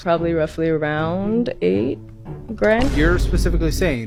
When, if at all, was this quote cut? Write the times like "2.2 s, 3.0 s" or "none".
none